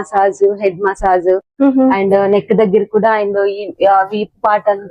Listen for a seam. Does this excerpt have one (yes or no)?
no